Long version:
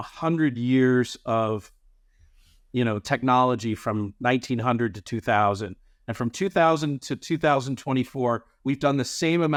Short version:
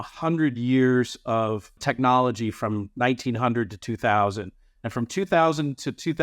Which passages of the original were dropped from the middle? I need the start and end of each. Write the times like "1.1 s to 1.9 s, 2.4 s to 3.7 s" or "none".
1.8 s to 3.0 s